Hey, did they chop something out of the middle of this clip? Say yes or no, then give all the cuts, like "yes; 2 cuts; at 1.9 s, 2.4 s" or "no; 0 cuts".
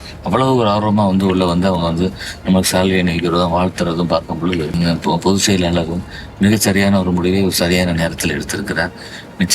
yes; 1 cut; at 4.8 s